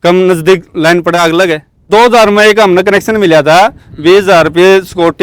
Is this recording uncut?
no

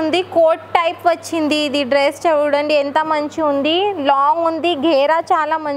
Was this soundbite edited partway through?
no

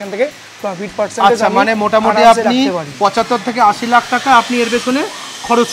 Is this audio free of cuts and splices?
yes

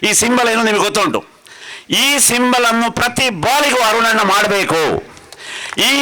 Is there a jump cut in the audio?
no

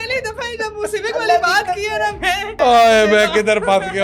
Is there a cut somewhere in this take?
yes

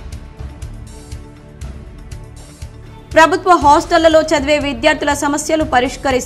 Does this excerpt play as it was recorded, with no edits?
no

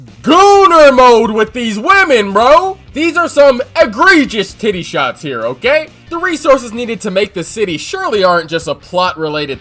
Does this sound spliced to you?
yes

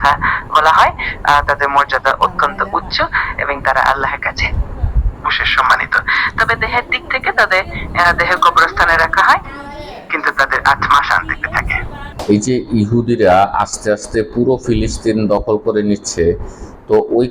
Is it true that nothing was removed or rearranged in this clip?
no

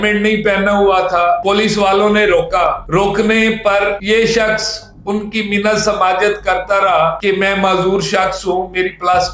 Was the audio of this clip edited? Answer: no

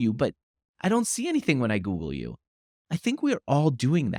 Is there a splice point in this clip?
no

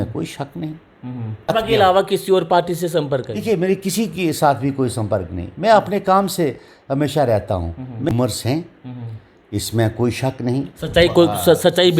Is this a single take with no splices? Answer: no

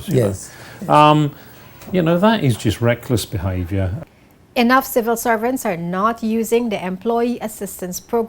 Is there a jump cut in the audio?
yes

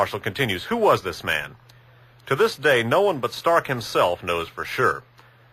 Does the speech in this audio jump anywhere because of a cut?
no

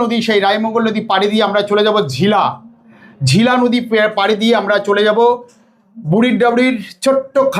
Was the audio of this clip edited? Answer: no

